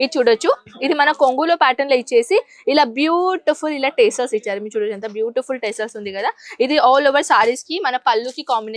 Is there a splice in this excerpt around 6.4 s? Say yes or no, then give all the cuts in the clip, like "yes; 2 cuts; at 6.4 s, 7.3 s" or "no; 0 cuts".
no; 0 cuts